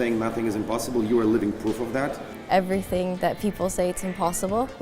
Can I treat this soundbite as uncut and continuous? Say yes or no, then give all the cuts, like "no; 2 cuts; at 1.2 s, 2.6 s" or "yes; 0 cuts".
no; 1 cut; at 2.3 s